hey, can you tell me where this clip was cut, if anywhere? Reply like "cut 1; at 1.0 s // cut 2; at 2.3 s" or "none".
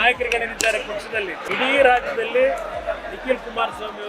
cut 1; at 1.4 s